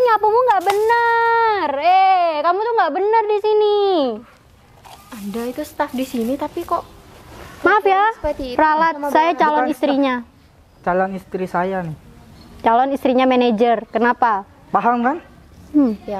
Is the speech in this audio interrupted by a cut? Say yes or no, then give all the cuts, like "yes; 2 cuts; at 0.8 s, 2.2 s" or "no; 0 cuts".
no; 0 cuts